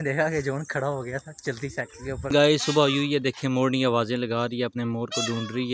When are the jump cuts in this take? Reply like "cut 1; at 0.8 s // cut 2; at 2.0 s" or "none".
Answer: cut 1; at 2.3 s